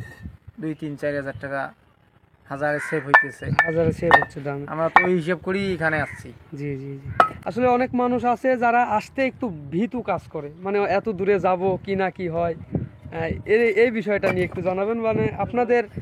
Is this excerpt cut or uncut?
uncut